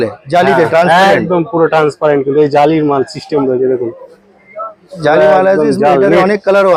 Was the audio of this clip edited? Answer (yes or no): no